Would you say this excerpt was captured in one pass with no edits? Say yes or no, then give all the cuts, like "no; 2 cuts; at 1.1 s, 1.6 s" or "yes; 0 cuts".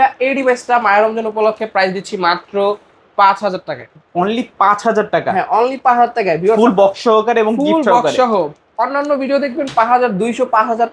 yes; 0 cuts